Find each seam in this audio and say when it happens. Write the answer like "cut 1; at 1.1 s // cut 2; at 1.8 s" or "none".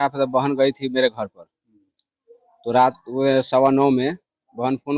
none